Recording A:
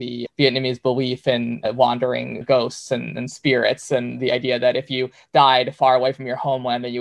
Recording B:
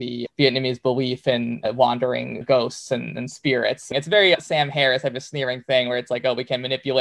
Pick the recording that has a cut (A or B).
B